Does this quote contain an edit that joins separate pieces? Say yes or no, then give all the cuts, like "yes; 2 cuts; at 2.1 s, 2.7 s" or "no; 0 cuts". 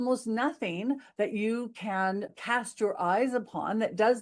yes; 1 cut; at 2.3 s